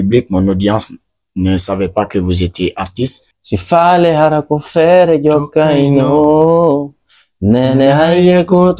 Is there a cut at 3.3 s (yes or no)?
yes